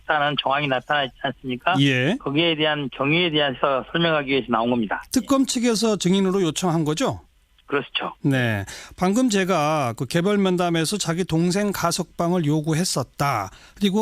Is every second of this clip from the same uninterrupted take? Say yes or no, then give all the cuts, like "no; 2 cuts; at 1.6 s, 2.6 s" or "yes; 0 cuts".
no; 1 cut; at 10.6 s